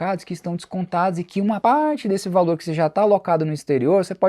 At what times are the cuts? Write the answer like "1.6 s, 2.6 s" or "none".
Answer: none